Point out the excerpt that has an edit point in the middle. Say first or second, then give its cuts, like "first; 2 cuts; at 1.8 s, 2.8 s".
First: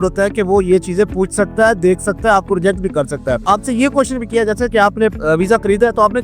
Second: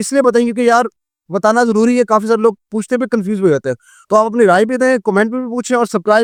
first; 1 cut; at 3.4 s